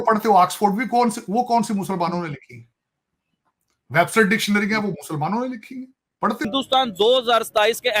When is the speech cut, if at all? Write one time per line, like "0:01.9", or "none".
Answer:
0:06.5